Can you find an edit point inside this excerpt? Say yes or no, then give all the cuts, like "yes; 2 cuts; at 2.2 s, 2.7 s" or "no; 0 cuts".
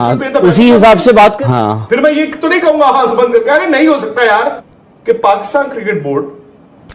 yes; 2 cuts; at 1.4 s, 4.6 s